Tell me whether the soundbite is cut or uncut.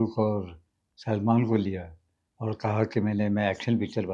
uncut